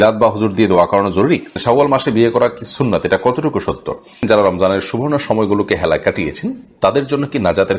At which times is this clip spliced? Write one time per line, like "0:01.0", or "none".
0:01.5
0:04.2